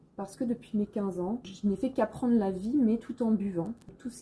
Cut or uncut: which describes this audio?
uncut